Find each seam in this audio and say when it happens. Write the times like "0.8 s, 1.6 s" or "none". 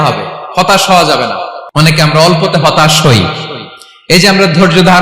1.5 s

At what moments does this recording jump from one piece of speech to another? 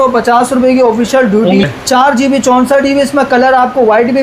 1.6 s

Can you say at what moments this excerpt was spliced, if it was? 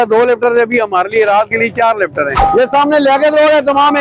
2.3 s

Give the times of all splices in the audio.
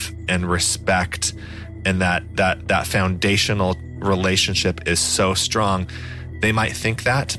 none

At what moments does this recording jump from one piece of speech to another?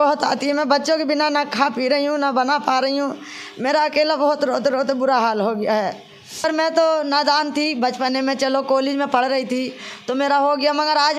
6.4 s

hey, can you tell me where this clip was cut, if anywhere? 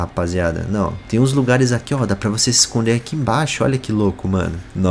none

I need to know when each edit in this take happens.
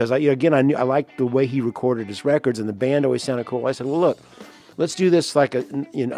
none

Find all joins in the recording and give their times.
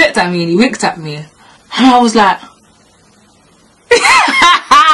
none

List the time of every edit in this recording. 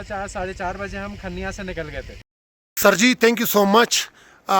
2.2 s

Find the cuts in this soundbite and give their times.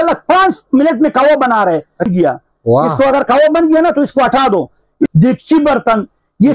2.1 s, 5.1 s

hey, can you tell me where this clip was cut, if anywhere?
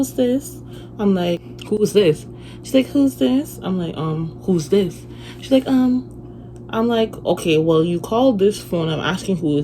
1.4 s

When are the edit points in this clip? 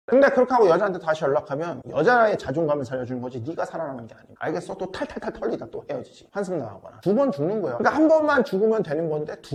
none

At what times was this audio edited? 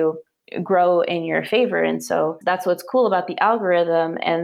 2.4 s

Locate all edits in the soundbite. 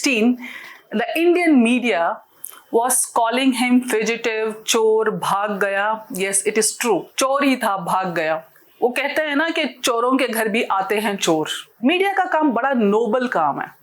11.7 s

